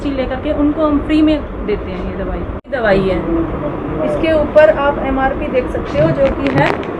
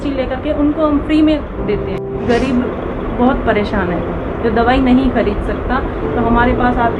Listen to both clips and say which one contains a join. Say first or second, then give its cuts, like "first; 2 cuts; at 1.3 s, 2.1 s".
second; 1 cut; at 2.0 s